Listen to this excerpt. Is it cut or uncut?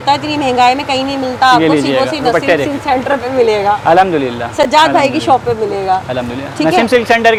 uncut